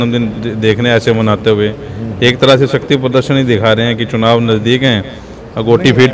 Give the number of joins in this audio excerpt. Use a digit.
0